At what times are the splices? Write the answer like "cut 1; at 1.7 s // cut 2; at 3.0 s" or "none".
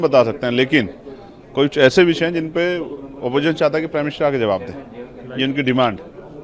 none